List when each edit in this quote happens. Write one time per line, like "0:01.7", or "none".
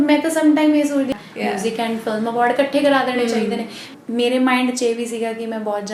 0:01.1
0:03.9

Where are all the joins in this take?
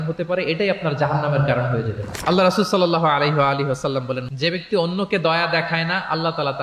0:04.3

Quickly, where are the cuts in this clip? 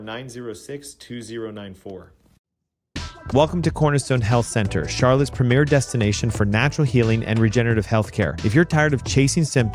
0:02.2

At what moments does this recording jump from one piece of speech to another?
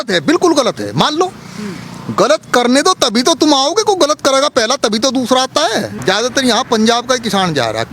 0:05.9

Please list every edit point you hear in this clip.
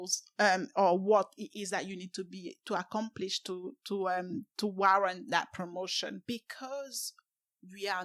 0:06.2

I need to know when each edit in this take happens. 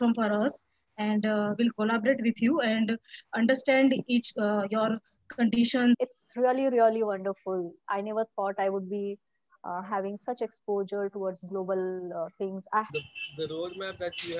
0:06.0
0:12.9

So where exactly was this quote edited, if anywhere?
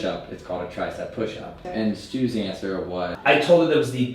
0:01.5
0:03.1

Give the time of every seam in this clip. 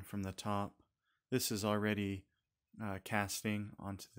none

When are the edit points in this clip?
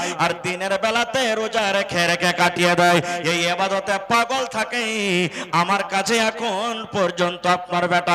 none

